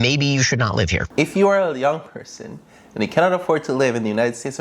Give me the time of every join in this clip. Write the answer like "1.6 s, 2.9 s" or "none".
1.0 s